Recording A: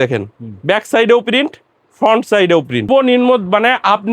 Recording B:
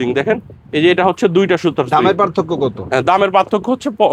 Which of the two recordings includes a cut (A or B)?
A